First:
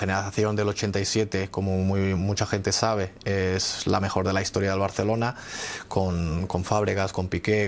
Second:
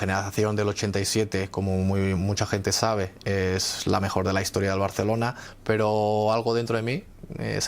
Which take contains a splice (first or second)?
second